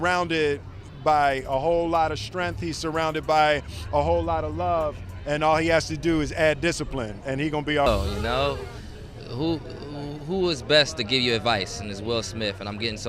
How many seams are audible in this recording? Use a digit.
1